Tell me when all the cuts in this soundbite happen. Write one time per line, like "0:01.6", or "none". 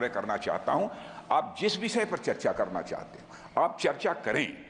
none